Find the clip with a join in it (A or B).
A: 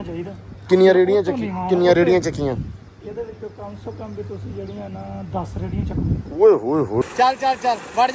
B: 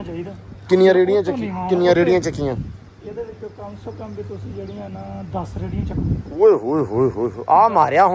A